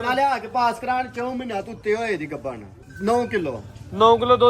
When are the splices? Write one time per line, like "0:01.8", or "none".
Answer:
0:02.8